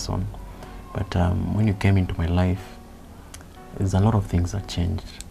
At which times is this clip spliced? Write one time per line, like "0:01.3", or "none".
none